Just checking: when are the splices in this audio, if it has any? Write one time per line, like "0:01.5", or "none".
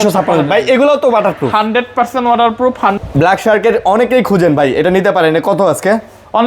0:03.0